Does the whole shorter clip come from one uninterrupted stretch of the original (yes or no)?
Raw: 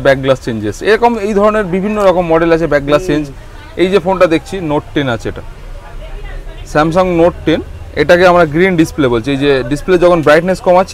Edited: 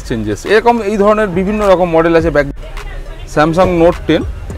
no